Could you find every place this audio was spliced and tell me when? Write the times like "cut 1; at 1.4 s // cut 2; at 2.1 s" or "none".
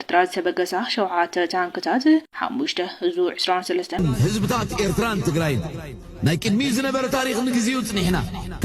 cut 1; at 3.9 s